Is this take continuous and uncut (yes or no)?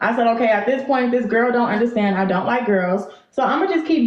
yes